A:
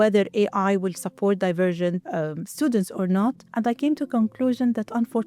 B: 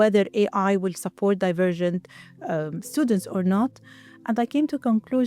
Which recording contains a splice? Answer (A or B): A